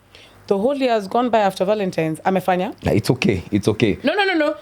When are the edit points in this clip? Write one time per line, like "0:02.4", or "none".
none